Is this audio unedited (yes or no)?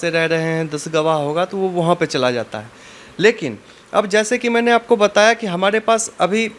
yes